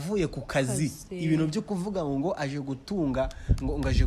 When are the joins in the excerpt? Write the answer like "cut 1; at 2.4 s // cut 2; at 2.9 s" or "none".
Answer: none